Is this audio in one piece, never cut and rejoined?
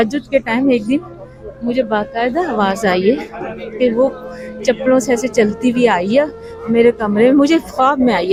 yes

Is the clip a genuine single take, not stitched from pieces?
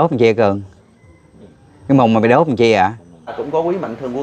no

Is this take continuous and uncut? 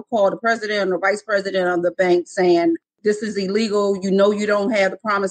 no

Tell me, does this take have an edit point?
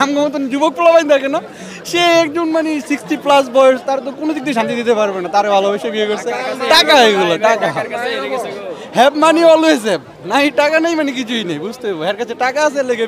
no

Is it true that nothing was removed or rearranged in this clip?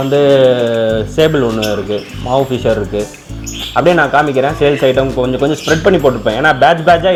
yes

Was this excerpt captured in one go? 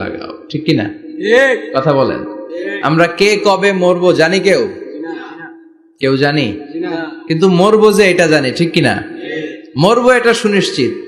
yes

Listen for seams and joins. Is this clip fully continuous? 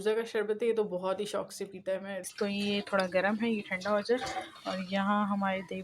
no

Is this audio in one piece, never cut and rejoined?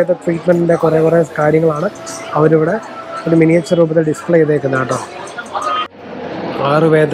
no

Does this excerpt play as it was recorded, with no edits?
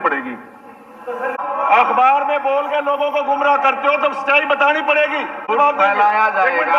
no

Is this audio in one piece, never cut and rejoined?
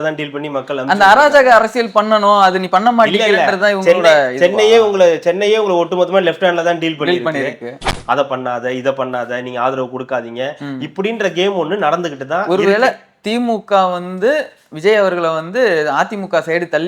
no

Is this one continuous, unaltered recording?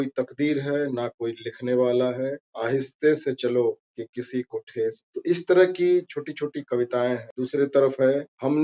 yes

